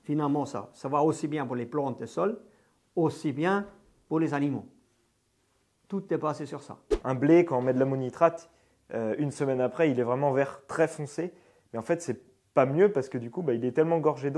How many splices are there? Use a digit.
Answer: 1